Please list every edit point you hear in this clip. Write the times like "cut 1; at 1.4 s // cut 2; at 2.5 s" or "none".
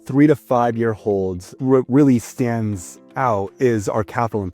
cut 1; at 1.6 s